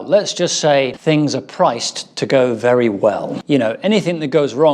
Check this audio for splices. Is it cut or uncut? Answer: cut